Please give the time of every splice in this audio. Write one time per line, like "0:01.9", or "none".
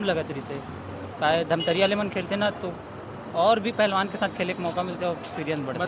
none